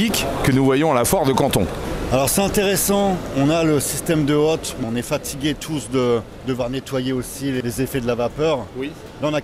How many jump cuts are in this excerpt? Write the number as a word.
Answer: four